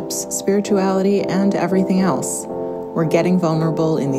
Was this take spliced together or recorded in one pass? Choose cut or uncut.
uncut